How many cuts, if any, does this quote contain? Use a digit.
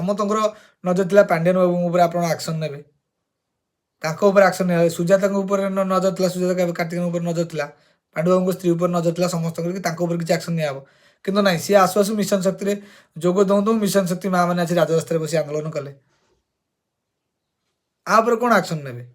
1